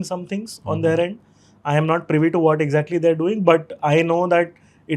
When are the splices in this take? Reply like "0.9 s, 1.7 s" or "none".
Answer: none